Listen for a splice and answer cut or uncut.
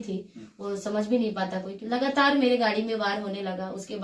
cut